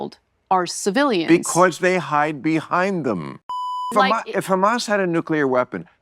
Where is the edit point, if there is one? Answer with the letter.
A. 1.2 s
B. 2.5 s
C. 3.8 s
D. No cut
C